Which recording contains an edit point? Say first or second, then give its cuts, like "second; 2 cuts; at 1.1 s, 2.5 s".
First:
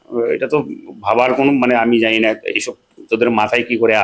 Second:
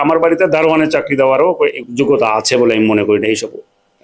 second; 1 cut; at 1.8 s